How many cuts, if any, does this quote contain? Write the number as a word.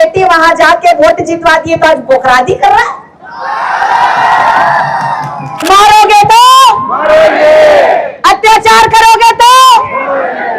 one